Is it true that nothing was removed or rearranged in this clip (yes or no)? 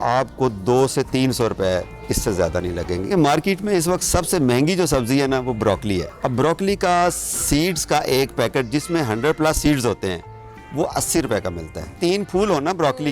no